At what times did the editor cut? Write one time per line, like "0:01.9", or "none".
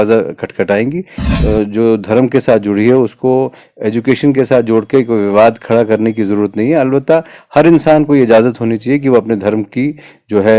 0:01.2